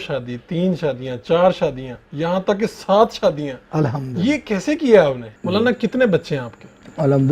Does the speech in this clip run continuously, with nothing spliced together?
no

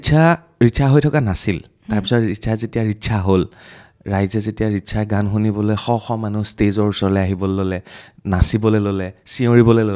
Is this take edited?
no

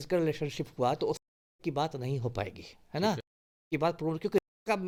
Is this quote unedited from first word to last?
yes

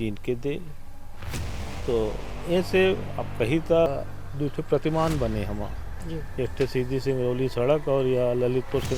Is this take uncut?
no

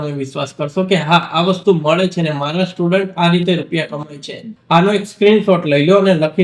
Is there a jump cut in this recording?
yes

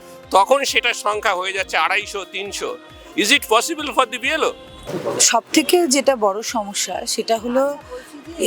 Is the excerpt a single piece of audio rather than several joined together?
yes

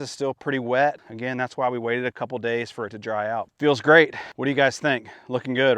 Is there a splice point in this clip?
yes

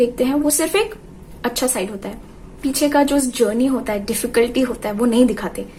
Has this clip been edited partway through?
no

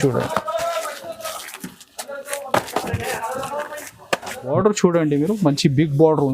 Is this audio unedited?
no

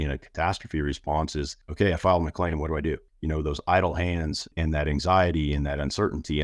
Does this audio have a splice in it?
yes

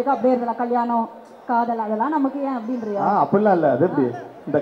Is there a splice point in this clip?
no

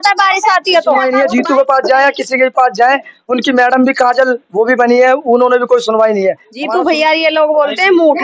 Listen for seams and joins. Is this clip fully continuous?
no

